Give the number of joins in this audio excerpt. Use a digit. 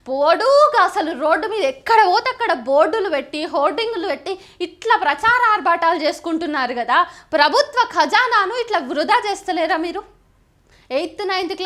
1